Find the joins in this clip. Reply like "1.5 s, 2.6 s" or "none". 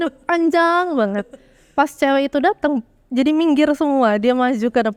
none